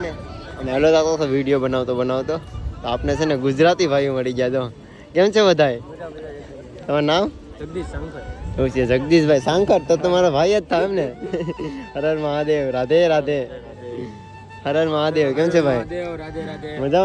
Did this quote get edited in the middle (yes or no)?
no